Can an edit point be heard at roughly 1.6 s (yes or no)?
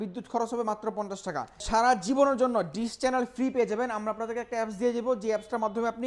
yes